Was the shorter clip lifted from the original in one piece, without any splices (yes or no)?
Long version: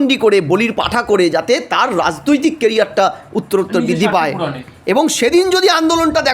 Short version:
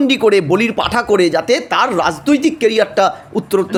yes